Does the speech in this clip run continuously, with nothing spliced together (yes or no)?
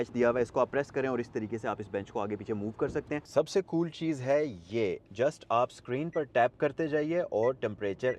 no